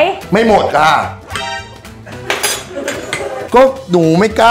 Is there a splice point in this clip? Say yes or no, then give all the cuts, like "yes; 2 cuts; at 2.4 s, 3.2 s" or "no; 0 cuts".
no; 0 cuts